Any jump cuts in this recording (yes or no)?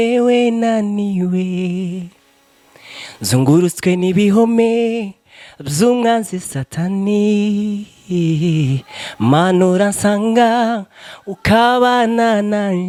no